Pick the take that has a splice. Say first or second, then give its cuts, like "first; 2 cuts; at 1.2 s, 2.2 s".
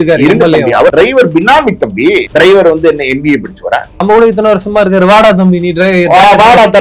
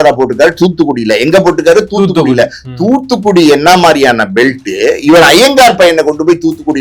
first; 3 cuts; at 0.9 s, 2.3 s, 4.0 s